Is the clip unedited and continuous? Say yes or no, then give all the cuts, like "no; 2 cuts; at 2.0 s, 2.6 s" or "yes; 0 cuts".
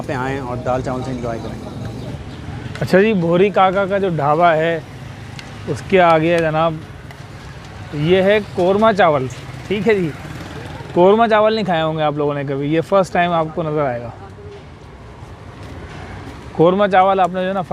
yes; 0 cuts